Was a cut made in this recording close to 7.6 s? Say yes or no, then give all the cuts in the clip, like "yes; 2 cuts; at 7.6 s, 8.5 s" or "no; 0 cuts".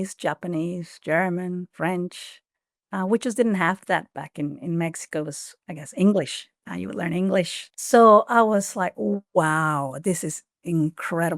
yes; 1 cut; at 7.6 s